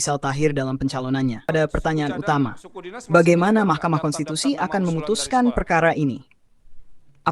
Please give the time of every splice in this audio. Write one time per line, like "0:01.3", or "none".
0:01.5